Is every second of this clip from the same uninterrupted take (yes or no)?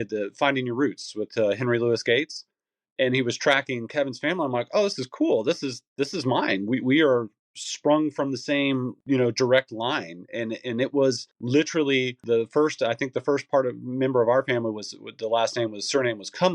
no